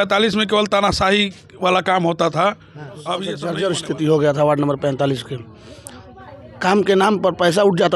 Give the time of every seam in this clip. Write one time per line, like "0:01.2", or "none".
0:03.4